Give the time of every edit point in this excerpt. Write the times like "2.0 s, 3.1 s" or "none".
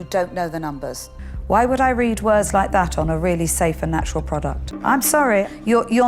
1.0 s